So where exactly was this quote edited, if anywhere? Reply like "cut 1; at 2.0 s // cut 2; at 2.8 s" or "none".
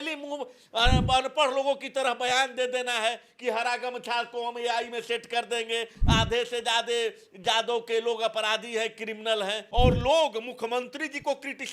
cut 1; at 9.6 s